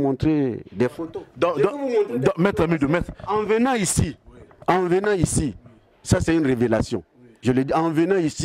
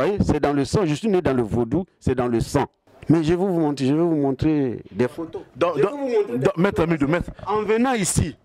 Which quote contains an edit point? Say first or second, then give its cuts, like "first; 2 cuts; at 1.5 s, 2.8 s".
second; 1 cut; at 2.9 s